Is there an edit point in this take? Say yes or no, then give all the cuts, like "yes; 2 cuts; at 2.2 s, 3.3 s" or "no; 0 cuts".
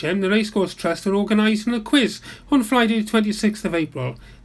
no; 0 cuts